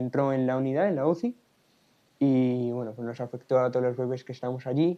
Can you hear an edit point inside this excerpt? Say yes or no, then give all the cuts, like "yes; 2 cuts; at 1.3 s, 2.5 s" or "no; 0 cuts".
no; 0 cuts